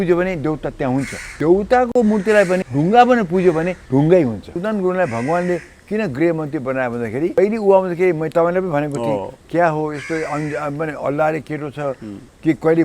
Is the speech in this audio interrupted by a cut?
yes; 5 cuts; at 1.3 s, 2.7 s, 3.8 s, 4.5 s, 7.4 s

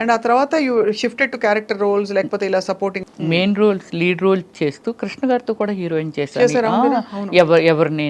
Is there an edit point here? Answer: yes; 1 cut; at 3.0 s

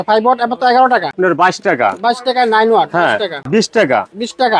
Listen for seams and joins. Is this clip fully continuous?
no; 2 cuts; at 1.1 s, 3.3 s

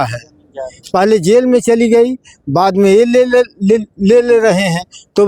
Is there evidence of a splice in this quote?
no; 0 cuts

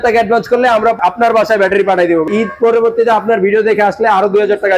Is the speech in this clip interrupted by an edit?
yes; 2 cuts; at 1.0 s, 2.3 s

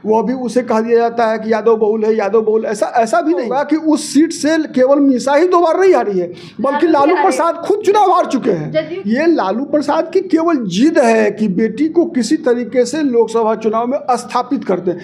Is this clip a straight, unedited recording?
no; 2 cuts; at 3.5 s, 8.9 s

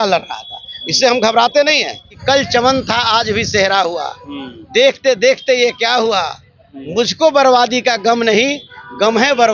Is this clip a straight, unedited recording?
no; 1 cut; at 2.1 s

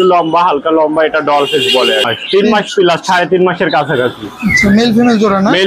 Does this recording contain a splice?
yes; 1 cut; at 2.1 s

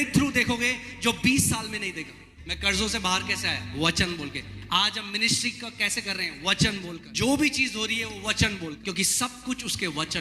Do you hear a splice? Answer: yes; 3 cuts; at 2.6 s, 7.1 s, 8.9 s

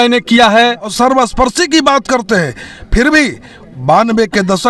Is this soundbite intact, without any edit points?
no; 1 cut; at 0.9 s

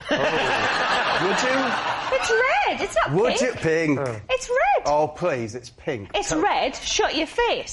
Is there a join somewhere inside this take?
no; 0 cuts

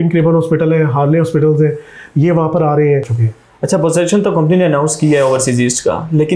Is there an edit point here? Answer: yes; 1 cut; at 3.2 s

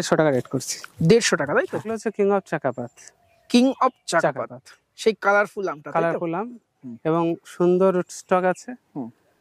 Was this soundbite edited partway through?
yes; 1 cut; at 2.0 s

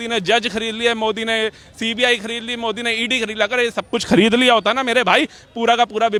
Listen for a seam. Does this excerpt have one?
no; 0 cuts

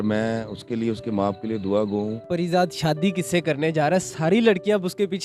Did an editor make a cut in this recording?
yes; 1 cut; at 2.3 s

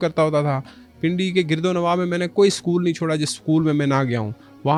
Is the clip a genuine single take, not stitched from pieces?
yes; 0 cuts

